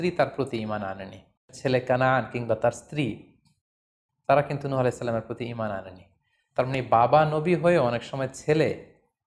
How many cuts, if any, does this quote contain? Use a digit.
1